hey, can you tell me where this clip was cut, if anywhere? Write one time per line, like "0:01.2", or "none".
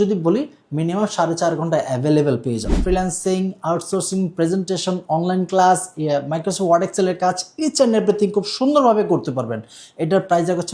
0:02.7